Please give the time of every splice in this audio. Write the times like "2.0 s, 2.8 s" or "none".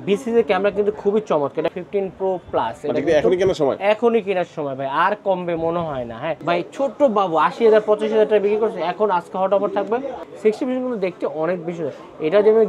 1.7 s, 6.4 s, 10.2 s